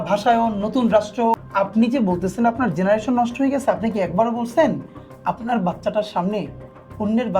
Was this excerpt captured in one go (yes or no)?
no